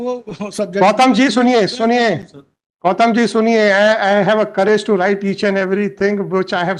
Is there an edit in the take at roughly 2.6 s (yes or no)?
no